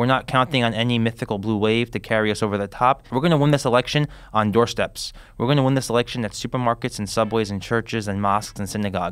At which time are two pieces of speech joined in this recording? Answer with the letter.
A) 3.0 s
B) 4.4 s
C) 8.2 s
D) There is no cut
A